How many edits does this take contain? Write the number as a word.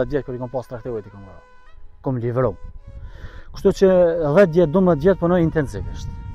zero